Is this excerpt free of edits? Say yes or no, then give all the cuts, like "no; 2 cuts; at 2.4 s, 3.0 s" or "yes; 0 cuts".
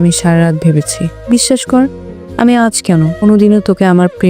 no; 1 cut; at 1.1 s